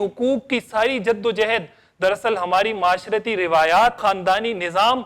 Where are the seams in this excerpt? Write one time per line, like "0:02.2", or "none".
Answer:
0:04.0